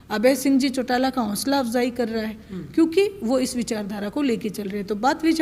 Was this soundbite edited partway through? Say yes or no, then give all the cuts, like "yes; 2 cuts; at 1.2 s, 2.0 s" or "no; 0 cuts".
no; 0 cuts